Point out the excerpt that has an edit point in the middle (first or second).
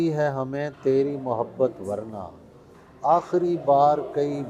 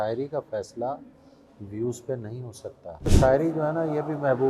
second